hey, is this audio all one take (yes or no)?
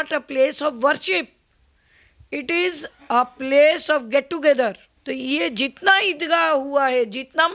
no